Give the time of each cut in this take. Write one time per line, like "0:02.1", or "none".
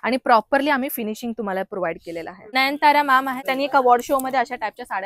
0:02.5
0:03.4